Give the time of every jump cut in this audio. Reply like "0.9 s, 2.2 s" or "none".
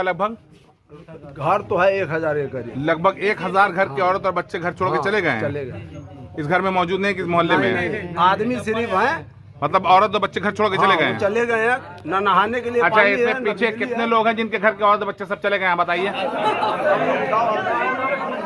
none